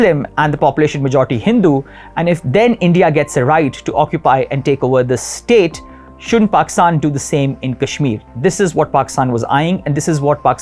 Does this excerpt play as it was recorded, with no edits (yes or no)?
yes